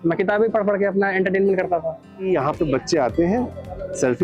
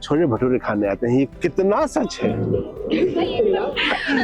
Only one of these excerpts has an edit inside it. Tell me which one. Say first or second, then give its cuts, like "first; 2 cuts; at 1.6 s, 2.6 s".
first; 1 cut; at 2.3 s